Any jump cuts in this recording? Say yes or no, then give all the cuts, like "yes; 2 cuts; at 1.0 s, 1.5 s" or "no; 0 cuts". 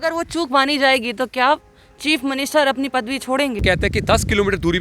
yes; 1 cut; at 3.6 s